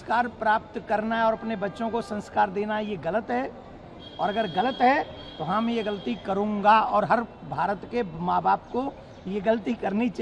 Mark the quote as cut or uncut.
uncut